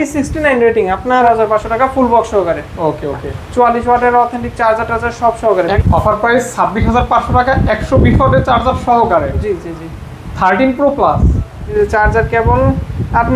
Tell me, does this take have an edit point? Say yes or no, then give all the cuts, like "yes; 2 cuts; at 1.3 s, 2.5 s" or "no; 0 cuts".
yes; 3 cuts; at 1.2 s, 5.8 s, 11.7 s